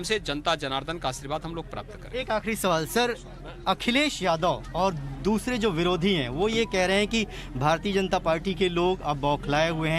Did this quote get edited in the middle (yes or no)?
no